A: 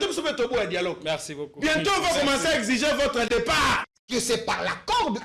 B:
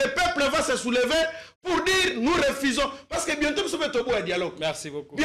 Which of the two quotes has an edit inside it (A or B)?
A